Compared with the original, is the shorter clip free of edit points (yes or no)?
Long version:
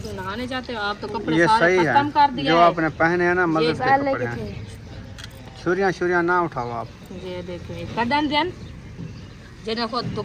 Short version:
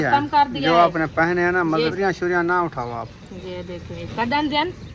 no